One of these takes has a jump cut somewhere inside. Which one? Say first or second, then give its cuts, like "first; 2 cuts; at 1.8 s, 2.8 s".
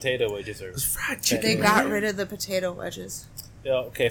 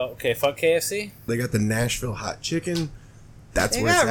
second; 1 cut; at 1.3 s